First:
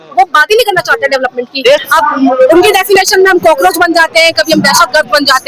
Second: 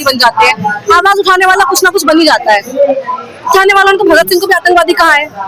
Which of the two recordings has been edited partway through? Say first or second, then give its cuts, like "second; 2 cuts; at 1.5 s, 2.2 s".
first; 1 cut; at 1.8 s